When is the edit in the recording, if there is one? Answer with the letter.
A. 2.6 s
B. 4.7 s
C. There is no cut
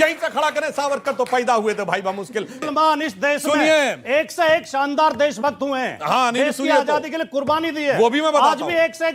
C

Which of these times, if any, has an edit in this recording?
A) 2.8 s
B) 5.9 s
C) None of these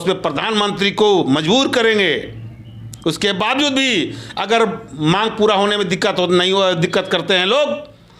C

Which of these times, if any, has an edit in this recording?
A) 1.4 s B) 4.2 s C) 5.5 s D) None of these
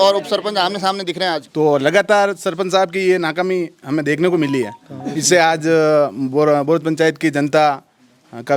A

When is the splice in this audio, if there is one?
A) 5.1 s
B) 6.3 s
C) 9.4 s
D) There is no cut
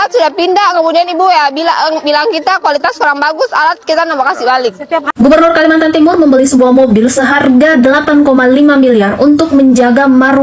A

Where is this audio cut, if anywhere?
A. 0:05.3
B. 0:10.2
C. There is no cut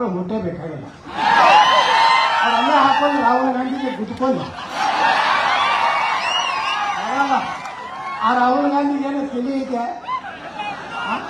C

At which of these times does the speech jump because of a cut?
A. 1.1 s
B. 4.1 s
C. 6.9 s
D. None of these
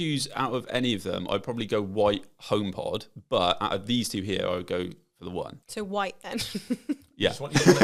D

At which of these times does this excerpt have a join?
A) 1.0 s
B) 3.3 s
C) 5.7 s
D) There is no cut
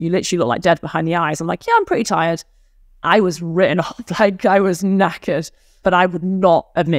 C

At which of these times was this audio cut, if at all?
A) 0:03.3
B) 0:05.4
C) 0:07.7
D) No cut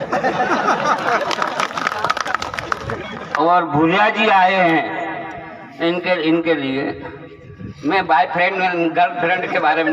A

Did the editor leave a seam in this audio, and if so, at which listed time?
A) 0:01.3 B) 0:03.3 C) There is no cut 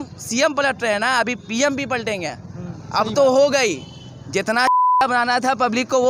C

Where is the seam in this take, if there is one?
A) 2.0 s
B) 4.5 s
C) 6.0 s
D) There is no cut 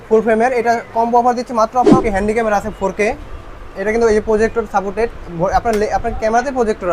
A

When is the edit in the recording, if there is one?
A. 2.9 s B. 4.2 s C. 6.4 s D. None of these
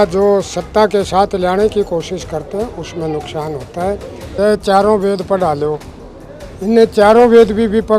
B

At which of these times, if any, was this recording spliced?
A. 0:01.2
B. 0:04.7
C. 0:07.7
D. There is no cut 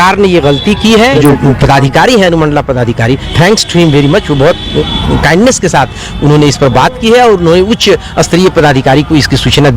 A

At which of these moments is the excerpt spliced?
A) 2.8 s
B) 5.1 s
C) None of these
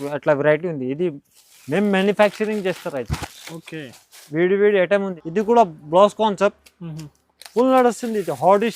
B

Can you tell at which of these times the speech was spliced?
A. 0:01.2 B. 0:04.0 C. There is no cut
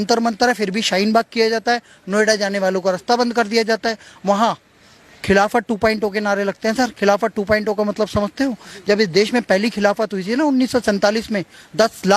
C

